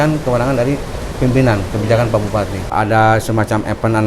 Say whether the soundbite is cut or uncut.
cut